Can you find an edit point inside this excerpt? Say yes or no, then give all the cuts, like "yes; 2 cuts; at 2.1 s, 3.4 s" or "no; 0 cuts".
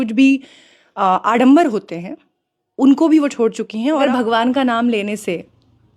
yes; 1 cut; at 4.0 s